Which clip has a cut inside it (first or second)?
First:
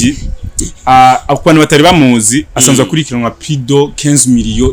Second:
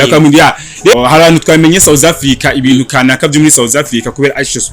second